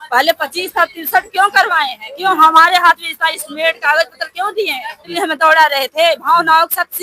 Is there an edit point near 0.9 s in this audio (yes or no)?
no